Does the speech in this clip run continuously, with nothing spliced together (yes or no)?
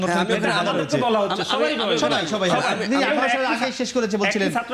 yes